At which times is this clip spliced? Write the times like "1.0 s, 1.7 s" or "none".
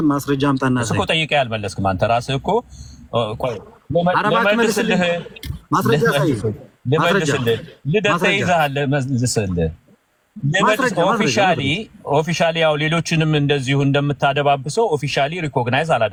none